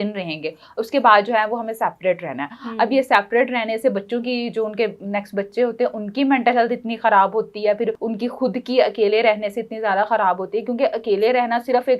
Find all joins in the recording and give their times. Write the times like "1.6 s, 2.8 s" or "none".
none